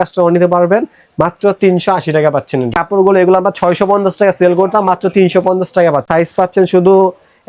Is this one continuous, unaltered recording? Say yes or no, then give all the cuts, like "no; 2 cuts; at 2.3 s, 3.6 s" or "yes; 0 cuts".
no; 2 cuts; at 2.7 s, 6.1 s